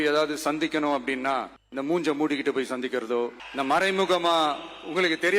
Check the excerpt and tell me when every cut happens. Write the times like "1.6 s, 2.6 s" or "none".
1.6 s, 3.4 s